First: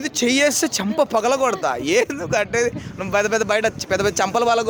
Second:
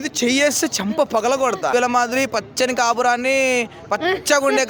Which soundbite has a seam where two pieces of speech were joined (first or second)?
second